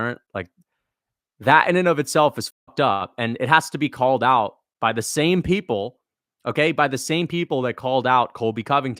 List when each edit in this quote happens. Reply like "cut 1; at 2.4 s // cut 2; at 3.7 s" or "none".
none